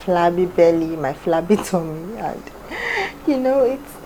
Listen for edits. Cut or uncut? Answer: uncut